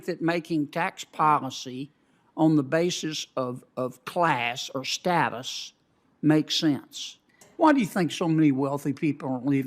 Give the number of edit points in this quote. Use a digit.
1